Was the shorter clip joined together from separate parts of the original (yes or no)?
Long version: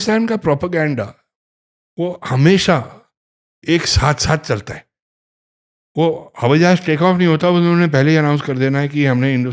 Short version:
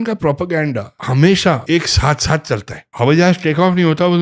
yes